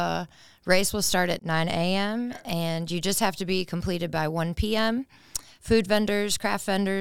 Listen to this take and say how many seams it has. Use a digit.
1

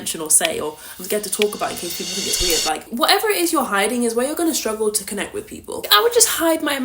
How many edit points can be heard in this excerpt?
2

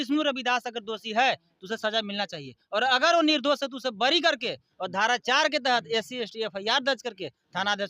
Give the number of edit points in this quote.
0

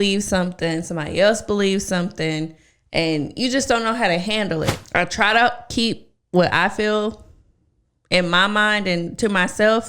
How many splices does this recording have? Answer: 1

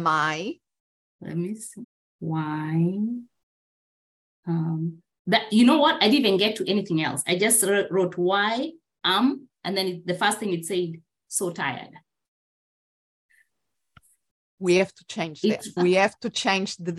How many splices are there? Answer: 1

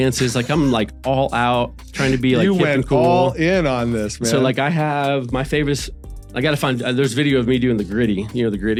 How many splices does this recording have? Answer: 0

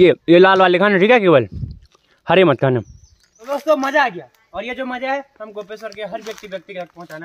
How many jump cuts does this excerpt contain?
1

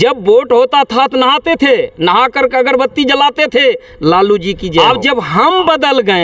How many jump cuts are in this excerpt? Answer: 1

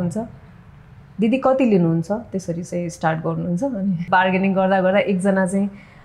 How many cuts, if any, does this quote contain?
1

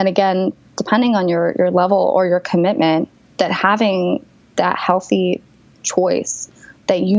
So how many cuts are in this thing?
1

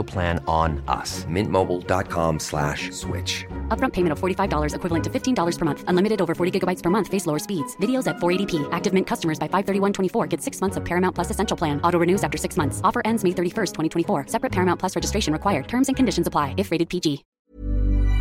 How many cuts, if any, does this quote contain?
1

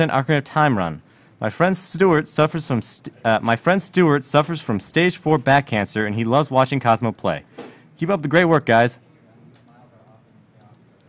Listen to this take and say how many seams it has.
0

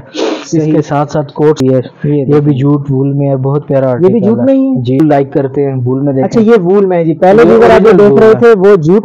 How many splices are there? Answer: 2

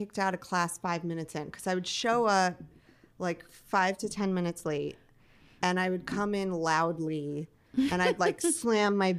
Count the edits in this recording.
0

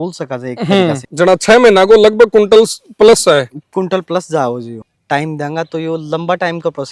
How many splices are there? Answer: 2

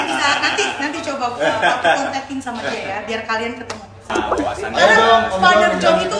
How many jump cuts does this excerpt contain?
1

